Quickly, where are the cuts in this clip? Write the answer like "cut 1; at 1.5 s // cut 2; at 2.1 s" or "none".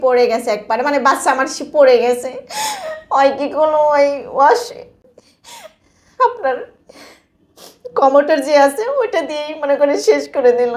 none